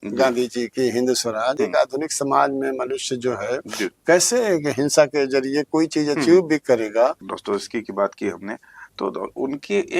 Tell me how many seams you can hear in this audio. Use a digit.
2